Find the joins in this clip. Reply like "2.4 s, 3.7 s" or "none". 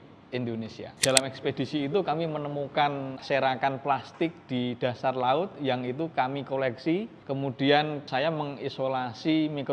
1.0 s, 3.2 s, 7.2 s, 8.1 s